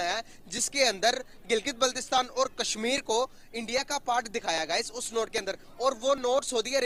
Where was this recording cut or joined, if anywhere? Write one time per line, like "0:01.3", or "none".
none